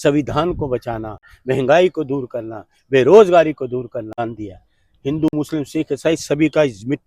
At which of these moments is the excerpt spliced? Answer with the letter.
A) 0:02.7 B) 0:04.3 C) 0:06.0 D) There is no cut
B